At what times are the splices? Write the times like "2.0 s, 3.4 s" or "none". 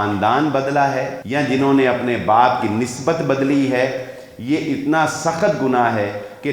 1.2 s